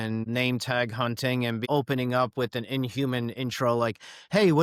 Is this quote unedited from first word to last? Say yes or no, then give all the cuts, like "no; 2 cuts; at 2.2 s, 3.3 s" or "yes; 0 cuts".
yes; 0 cuts